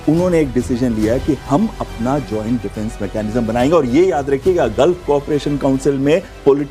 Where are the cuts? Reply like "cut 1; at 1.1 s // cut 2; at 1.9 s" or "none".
none

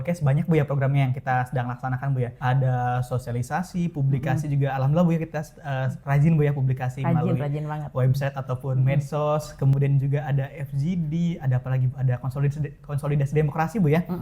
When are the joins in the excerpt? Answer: cut 1; at 2.4 s

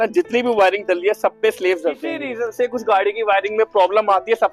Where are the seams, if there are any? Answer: cut 1; at 2.3 s

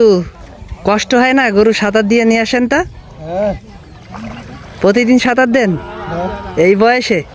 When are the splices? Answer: none

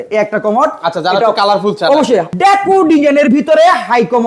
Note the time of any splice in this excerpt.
cut 1; at 2.3 s

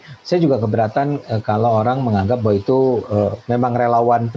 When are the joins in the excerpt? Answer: none

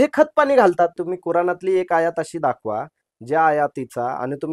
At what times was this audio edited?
cut 1; at 1.1 s

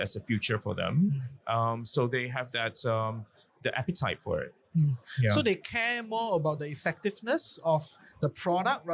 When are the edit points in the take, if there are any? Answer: none

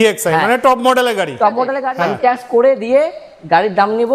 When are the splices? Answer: cut 1; at 1.8 s

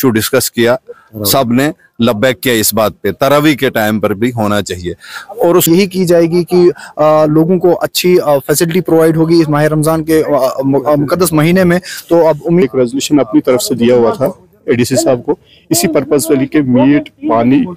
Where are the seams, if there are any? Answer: cut 1; at 5.6 s // cut 2; at 12.6 s

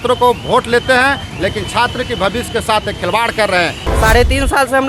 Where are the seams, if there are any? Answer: cut 1; at 3.8 s

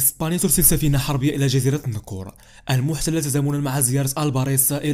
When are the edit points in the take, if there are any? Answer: none

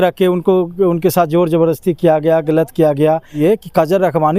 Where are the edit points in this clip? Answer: cut 1; at 3.3 s

